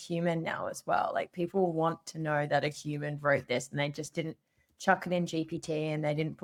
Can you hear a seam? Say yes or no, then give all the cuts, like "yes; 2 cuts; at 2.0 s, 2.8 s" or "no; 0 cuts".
no; 0 cuts